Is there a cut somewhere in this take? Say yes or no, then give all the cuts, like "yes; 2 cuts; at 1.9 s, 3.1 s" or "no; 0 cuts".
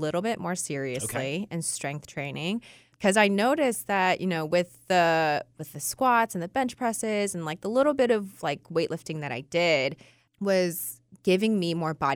no; 0 cuts